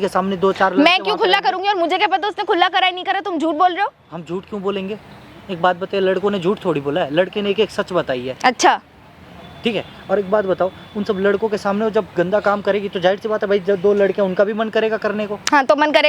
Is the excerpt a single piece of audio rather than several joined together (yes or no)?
yes